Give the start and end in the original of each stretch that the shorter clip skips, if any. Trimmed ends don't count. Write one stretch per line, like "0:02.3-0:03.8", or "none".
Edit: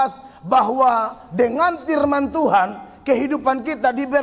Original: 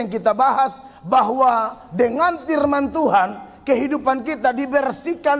none

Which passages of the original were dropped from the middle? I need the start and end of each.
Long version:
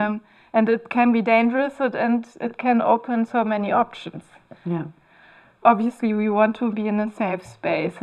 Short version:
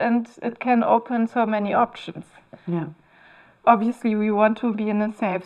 none

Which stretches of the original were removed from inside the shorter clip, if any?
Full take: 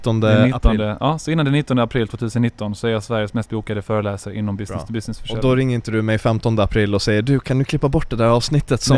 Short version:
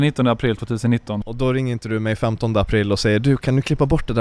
0:02.7-0:05.3

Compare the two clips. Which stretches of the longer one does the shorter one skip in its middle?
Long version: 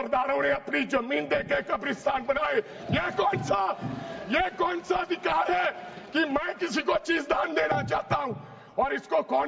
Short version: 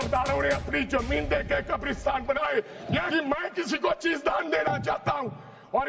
0:03.1-0:06.1

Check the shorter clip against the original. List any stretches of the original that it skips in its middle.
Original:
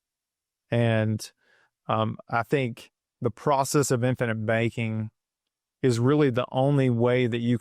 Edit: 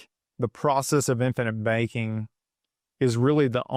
none

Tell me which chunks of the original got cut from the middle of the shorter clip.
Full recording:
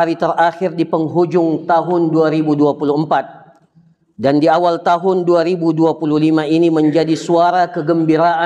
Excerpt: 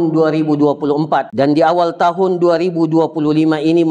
0:03.3-0:04.1

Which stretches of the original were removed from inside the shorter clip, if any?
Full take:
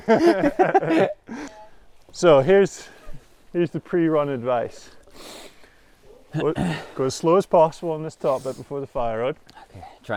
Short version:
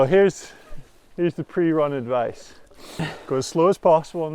0:05.5-0:06.8

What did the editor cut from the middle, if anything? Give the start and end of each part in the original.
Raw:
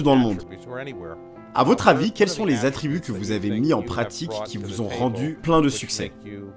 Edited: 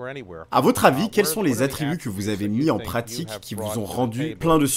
none

